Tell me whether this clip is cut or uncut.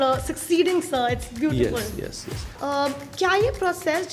cut